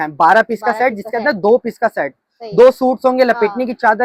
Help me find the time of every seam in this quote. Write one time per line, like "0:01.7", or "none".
none